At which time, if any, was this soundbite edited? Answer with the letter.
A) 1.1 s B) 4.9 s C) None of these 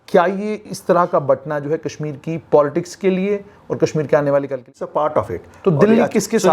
B